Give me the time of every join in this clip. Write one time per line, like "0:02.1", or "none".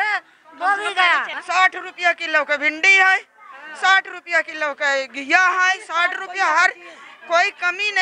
0:01.3